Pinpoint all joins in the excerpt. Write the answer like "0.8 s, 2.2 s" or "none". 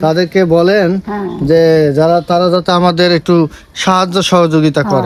none